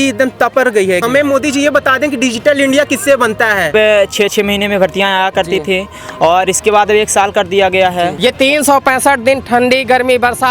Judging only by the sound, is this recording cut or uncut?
cut